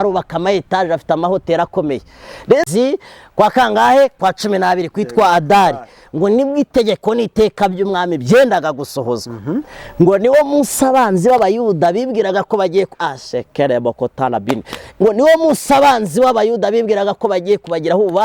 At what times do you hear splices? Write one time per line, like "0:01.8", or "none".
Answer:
0:02.6